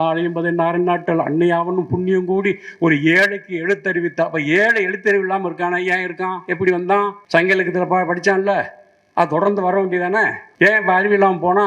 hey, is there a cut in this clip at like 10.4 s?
yes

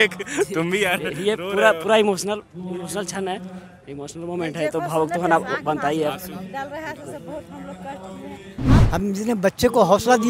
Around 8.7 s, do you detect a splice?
yes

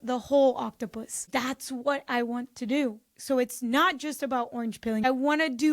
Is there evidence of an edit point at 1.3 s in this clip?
yes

